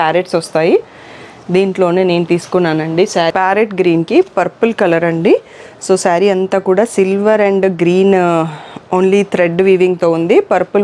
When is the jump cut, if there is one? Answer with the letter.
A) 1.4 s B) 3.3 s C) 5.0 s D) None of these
B